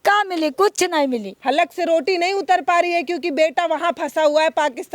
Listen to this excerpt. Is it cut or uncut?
cut